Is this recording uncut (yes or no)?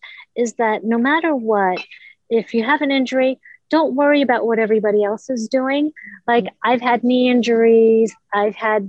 yes